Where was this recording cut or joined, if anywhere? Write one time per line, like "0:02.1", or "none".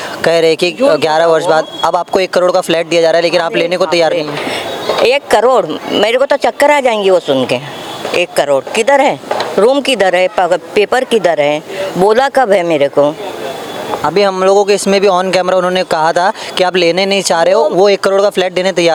none